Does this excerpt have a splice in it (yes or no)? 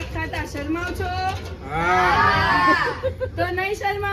no